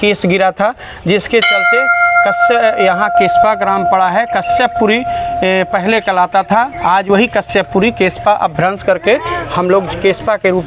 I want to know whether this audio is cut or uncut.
uncut